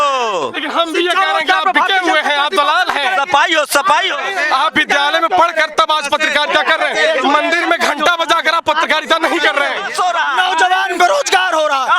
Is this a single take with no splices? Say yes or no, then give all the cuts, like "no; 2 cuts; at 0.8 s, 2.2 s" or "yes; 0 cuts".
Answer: no; 2 cuts; at 4.3 s, 9.9 s